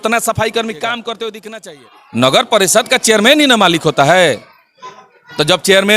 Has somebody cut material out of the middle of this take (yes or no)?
yes